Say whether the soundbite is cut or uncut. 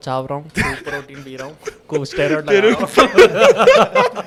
uncut